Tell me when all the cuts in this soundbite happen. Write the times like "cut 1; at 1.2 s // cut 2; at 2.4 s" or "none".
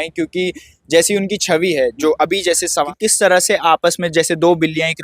cut 1; at 2.9 s

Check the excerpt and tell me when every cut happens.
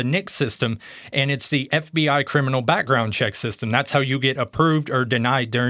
none

